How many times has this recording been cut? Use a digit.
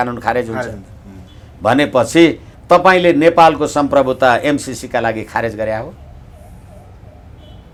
0